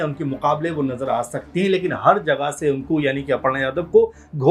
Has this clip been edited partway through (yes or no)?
no